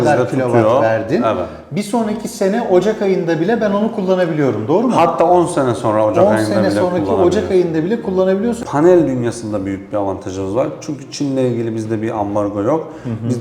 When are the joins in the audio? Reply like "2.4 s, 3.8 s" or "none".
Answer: 8.6 s